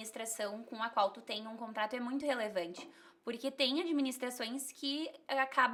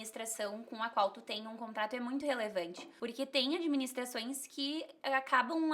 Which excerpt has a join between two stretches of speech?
second; 1 cut; at 2.9 s

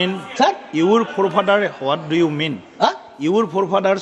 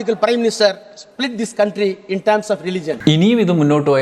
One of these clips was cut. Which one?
second; 1 cut; at 3.0 s

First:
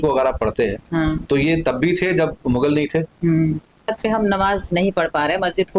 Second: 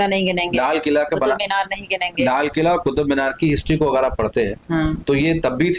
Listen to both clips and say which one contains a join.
first; 1 cut; at 3.9 s

